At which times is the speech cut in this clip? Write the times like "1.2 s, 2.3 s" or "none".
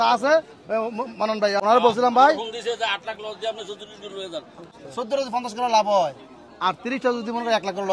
1.6 s, 4.8 s